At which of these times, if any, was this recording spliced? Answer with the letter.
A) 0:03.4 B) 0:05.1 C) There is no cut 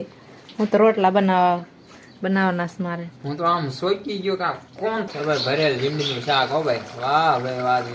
B